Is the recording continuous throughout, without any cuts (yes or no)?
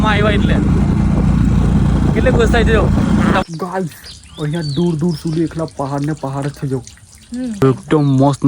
no